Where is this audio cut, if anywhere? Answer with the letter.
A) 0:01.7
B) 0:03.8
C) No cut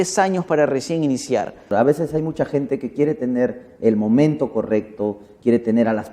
A